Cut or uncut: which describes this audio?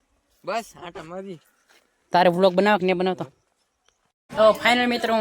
cut